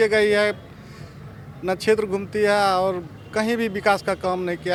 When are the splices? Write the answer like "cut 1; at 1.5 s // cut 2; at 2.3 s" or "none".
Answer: none